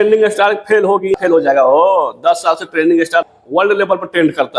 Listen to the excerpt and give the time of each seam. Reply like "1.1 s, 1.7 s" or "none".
1.1 s, 3.2 s